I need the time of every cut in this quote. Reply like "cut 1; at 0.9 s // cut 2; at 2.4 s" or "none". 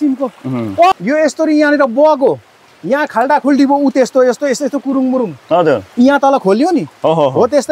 cut 1; at 0.9 s